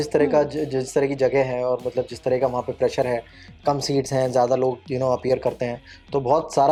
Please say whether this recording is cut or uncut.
uncut